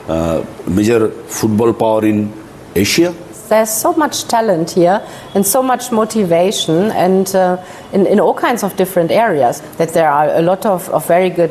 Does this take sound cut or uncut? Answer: cut